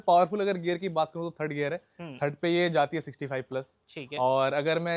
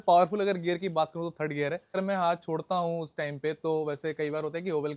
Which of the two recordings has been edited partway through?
second; 1 cut; at 2.0 s

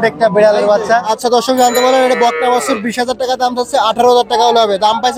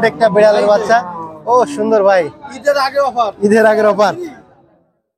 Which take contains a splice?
first; 1 cut; at 1.1 s

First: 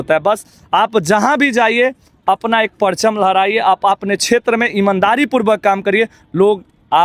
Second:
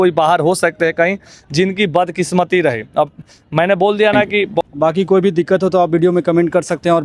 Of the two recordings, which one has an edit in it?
second; 1 cut; at 4.6 s

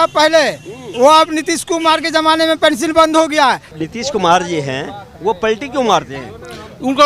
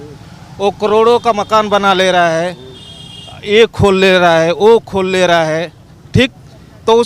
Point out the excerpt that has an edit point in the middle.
first; 1 cut; at 3.7 s

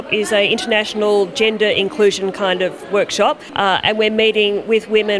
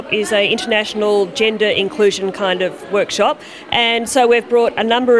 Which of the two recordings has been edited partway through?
first; 1 cut; at 3.5 s

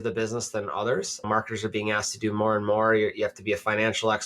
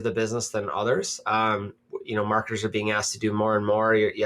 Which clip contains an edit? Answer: first; 1 cut; at 1.3 s

